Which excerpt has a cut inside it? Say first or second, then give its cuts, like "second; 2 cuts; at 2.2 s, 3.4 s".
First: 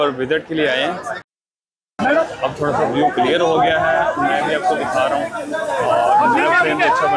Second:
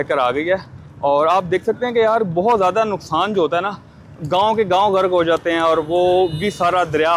first; 1 cut; at 1.3 s